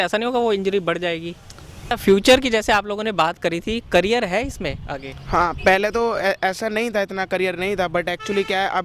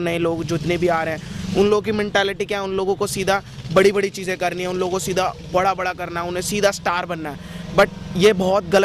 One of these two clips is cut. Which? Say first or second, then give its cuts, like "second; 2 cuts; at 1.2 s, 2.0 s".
first; 1 cut; at 1.9 s